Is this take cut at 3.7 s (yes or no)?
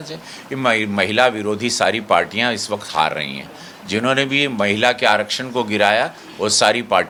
no